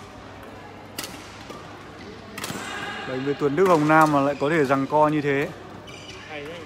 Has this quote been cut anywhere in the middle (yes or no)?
no